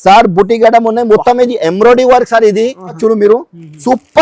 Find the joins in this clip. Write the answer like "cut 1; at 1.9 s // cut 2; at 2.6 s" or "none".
cut 1; at 3.0 s